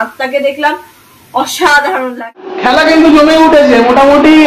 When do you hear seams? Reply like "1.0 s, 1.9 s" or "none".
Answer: 2.2 s